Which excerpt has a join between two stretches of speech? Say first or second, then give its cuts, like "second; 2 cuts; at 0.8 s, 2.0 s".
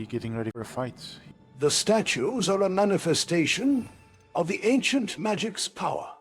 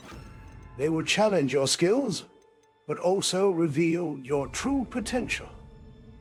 first; 1 cut; at 1.1 s